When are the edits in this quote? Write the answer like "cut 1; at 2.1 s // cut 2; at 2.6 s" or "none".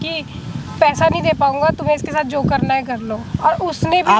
none